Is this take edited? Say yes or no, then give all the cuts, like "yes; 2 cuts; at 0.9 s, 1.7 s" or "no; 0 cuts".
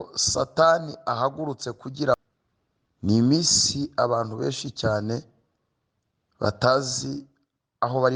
yes; 1 cut; at 2.1 s